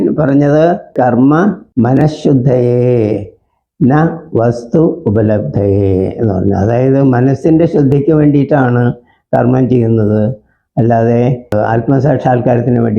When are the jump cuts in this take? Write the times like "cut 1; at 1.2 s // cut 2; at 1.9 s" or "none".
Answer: cut 1; at 0.9 s // cut 2; at 1.6 s // cut 3; at 11.5 s